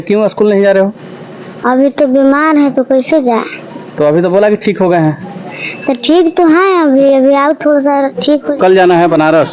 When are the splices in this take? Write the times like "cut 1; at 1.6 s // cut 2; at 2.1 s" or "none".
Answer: cut 1; at 8.5 s

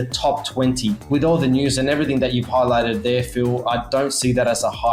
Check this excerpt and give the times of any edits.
cut 1; at 1.1 s

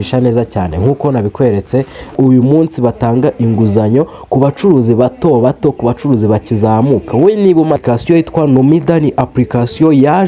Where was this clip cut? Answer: cut 1; at 2.1 s // cut 2; at 7.8 s

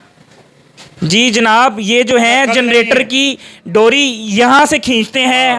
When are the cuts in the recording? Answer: none

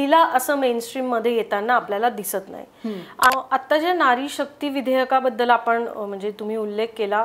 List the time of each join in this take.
cut 1; at 3.3 s

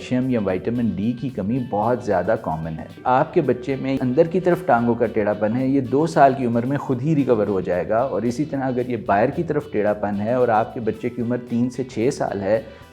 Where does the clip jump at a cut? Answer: cut 1; at 3.0 s // cut 2; at 4.0 s

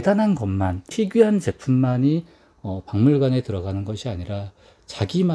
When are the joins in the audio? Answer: cut 1; at 0.9 s

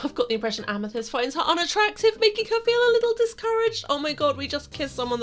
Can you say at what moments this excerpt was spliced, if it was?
none

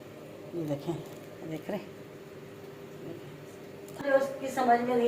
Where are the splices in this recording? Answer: cut 1; at 4.0 s

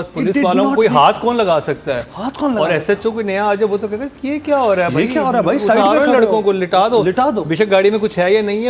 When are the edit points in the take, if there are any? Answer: none

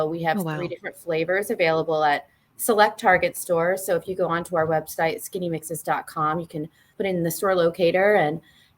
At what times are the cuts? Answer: cut 1; at 6.9 s

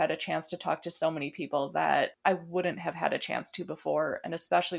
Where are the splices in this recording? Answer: cut 1; at 2.2 s

